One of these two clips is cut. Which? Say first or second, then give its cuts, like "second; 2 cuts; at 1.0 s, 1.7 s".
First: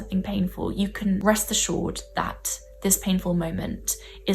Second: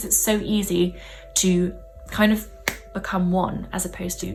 first; 1 cut; at 1.2 s